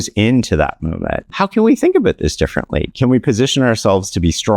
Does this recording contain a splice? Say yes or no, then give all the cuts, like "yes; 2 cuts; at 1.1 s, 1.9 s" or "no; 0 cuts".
yes; 1 cut; at 1.2 s